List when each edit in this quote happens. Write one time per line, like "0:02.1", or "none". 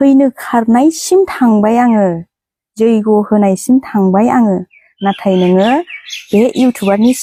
none